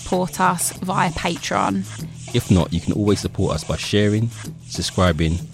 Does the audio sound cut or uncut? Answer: uncut